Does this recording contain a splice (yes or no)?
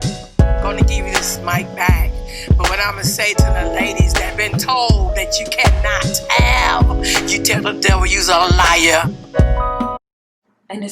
yes